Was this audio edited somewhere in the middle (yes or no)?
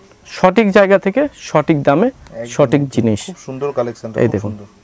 no